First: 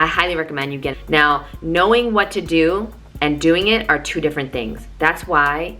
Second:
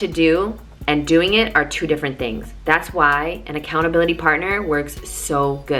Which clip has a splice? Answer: first; 1 cut; at 1.0 s

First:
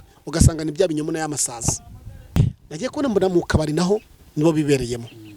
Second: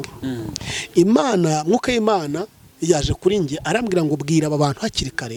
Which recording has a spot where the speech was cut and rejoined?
first; 1 cut; at 2.4 s

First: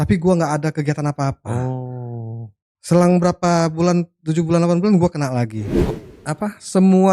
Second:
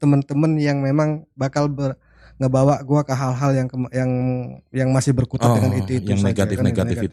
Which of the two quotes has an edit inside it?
first; 1 cut; at 5.8 s

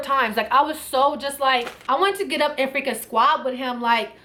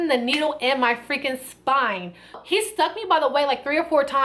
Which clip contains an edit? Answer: second; 1 cut; at 2.4 s

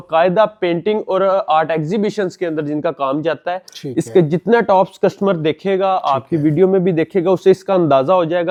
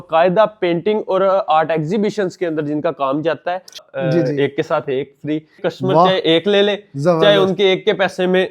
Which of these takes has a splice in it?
second; 2 cuts; at 3.8 s, 5.6 s

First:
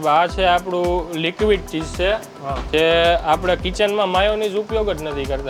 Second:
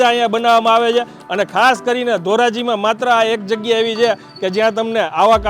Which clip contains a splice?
second; 1 cut; at 1.2 s

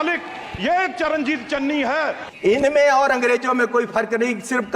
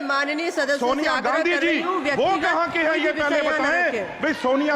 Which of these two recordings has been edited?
first; 1 cut; at 2.2 s

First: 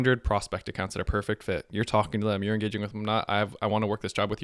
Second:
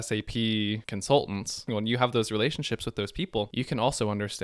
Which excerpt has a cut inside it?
second; 3 cuts; at 0.9 s, 1.7 s, 3.5 s

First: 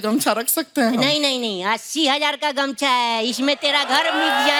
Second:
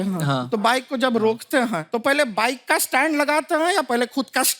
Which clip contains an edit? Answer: second; 1 cut; at 1.9 s

